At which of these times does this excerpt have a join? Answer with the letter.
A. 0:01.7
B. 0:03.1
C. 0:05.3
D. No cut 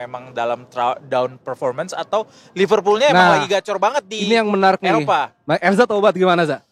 D